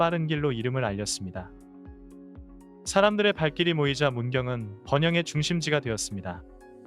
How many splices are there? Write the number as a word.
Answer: two